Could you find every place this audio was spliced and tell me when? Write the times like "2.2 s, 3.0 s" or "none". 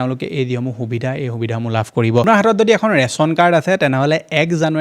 2.2 s